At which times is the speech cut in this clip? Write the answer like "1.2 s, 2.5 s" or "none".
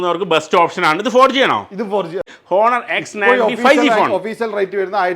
2.3 s